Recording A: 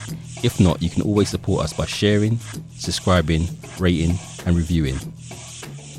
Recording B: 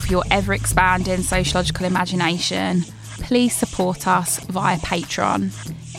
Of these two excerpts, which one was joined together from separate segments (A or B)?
A